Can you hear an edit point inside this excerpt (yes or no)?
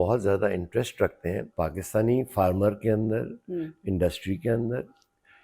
yes